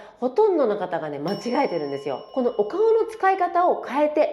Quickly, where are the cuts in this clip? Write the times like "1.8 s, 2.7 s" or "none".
2.2 s